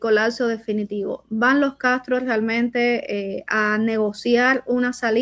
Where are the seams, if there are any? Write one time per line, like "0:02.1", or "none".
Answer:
none